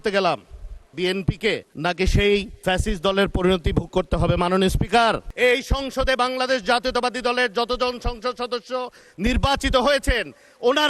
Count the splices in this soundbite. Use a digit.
2